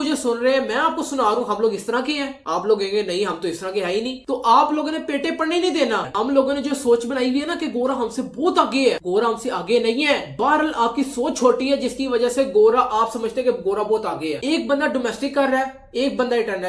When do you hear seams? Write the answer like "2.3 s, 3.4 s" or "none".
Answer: 6.1 s, 14.4 s